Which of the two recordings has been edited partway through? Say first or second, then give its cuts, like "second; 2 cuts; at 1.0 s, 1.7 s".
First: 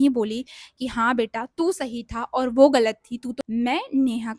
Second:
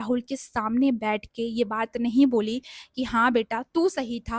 first; 1 cut; at 3.3 s